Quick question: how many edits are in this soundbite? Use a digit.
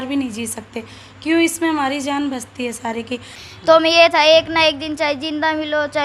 1